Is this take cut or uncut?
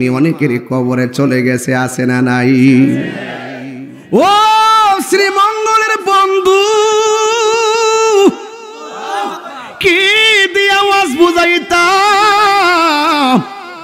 uncut